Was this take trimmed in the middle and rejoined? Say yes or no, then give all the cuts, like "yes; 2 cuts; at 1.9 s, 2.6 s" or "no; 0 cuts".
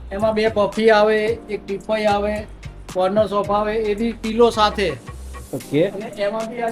no; 0 cuts